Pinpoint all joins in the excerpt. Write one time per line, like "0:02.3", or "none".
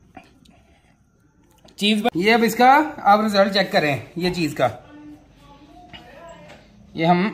0:02.1